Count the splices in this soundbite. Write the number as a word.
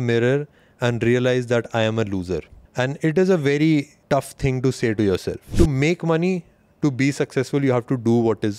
three